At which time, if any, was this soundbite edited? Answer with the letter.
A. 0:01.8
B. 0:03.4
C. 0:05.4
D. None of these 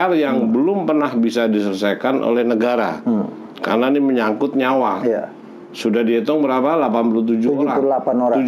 D